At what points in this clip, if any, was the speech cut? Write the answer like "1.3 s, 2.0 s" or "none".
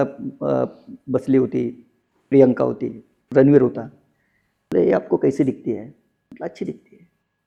none